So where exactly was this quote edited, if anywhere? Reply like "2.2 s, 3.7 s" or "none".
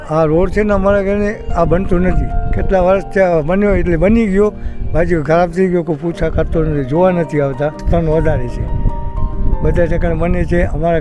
7.9 s